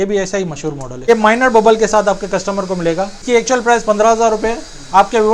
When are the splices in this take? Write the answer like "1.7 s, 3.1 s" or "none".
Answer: 1.1 s, 3.2 s